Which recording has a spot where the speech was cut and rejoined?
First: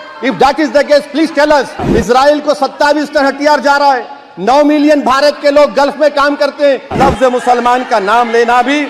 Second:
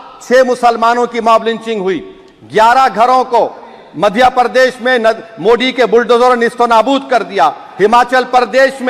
first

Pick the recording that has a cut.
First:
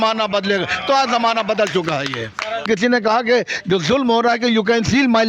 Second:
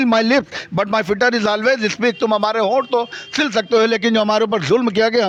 first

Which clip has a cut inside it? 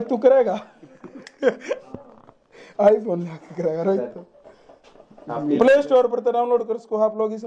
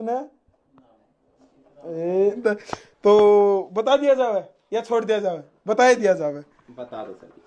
second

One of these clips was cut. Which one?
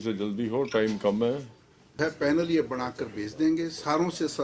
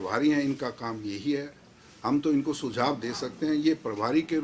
first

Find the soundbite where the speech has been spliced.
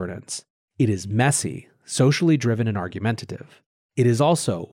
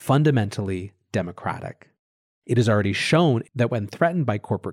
second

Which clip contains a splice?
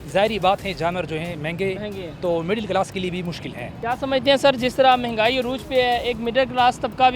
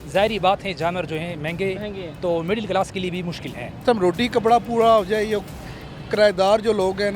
second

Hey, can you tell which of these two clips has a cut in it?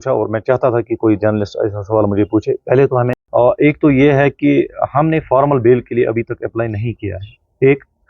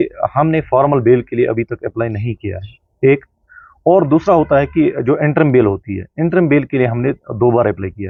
first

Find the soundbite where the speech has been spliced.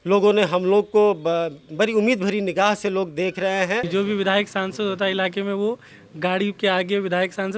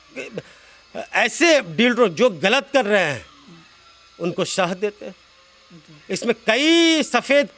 first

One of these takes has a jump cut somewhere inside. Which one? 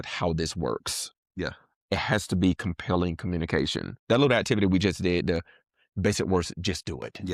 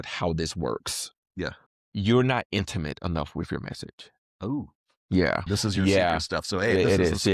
second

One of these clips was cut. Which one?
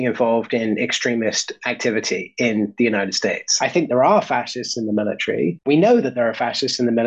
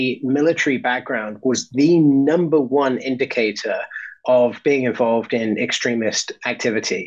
first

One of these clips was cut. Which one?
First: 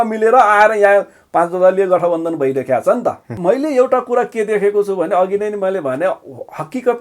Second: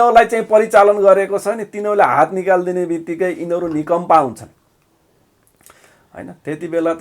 first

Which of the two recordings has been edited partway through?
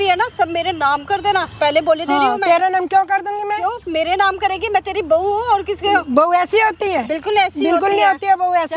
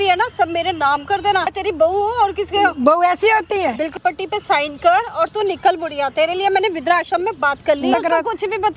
second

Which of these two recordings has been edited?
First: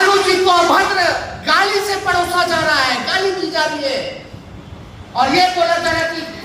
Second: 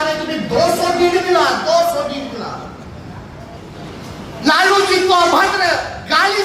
second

